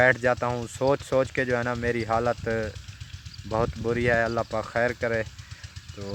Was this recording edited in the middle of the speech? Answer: no; 0 cuts

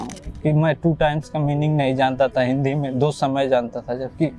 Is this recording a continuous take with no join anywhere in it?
yes; 0 cuts

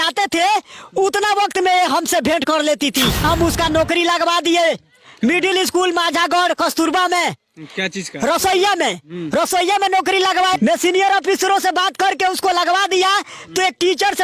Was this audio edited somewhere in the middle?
yes; 2 cuts; at 3.2 s, 10.5 s

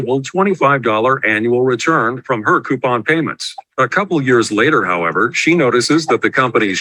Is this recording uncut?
yes; 0 cuts

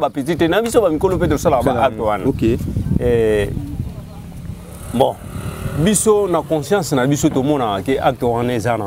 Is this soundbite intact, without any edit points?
yes; 0 cuts

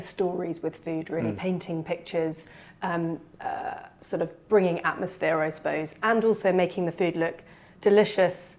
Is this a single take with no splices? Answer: yes; 0 cuts

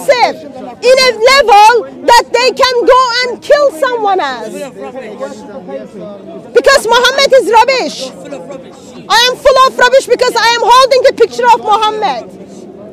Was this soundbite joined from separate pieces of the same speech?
no; 0 cuts

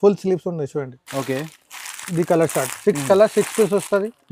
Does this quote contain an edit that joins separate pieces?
no; 0 cuts

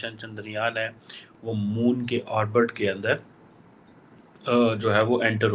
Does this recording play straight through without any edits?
yes; 0 cuts

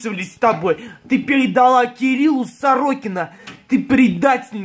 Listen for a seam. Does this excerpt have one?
no; 0 cuts

